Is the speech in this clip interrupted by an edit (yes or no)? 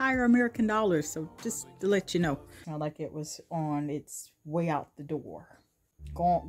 yes